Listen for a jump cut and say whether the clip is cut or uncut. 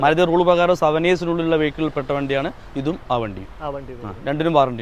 uncut